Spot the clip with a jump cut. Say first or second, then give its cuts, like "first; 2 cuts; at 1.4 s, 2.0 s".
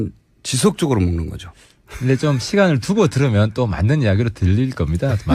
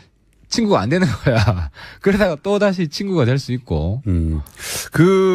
first; 1 cut; at 3.2 s